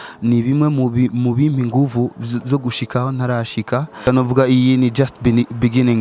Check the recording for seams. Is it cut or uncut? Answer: cut